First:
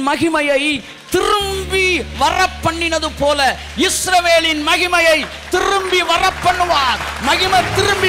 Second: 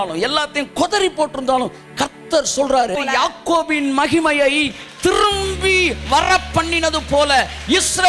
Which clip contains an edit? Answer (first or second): second